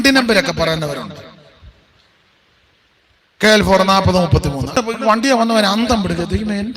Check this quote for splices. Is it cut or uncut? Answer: cut